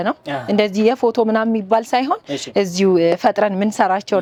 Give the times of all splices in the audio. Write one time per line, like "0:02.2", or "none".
none